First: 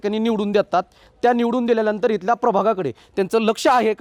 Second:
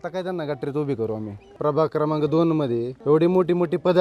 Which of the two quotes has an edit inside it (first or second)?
second